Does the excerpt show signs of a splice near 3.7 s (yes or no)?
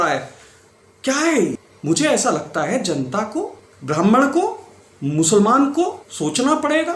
yes